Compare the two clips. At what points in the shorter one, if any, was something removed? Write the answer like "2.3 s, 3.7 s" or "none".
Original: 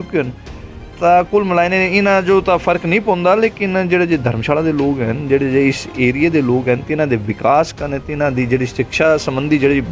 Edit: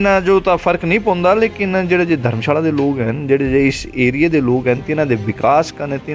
none